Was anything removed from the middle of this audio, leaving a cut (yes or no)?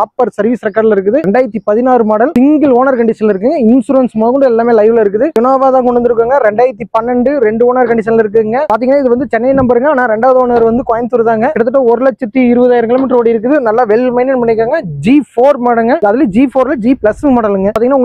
no